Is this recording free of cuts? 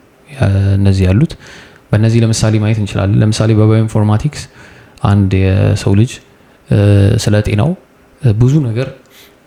yes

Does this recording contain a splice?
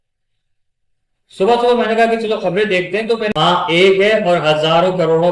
yes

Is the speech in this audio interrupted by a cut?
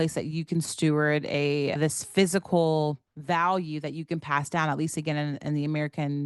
yes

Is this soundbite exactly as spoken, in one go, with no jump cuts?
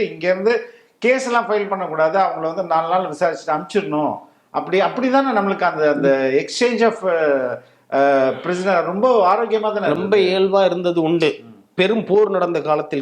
yes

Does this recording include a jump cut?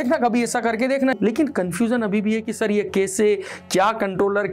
yes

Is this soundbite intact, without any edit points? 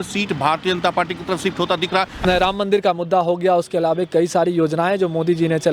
no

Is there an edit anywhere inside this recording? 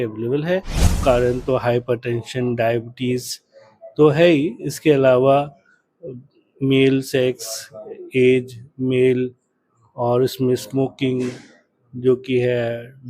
yes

